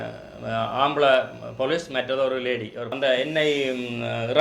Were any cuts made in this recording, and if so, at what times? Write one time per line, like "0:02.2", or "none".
0:02.9